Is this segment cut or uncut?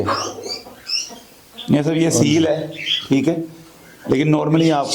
uncut